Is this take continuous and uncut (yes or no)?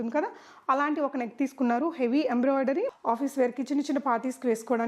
no